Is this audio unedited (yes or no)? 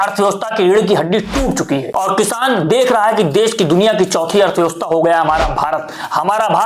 yes